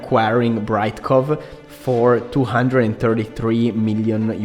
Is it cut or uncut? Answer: uncut